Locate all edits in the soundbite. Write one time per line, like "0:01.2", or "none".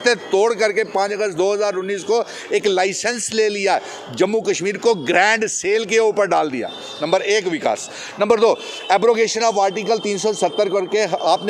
none